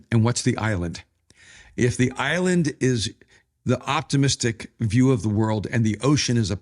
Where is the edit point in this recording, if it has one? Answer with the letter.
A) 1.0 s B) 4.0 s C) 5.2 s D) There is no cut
D